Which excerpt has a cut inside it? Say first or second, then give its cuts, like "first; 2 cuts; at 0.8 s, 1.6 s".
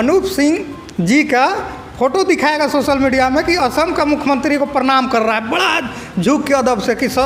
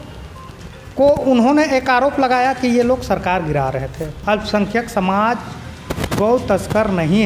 second; 1 cut; at 4.0 s